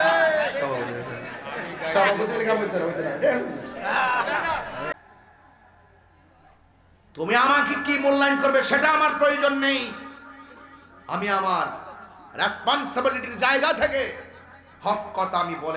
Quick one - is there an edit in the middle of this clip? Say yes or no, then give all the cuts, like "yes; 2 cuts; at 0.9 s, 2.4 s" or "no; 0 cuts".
yes; 1 cut; at 4.9 s